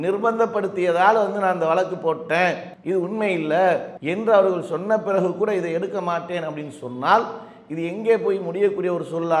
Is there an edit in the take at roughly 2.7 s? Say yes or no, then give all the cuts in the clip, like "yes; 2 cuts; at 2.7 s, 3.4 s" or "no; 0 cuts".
yes; 2 cuts; at 2.7 s, 4.0 s